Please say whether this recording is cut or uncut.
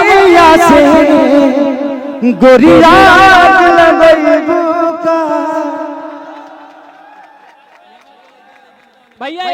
uncut